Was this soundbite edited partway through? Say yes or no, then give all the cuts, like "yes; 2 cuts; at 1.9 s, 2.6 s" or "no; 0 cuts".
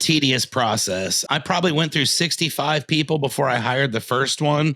yes; 1 cut; at 1.2 s